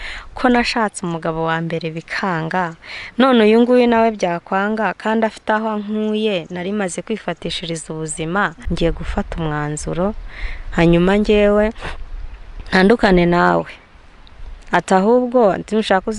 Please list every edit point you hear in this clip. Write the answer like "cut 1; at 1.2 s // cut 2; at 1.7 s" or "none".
cut 1; at 8.6 s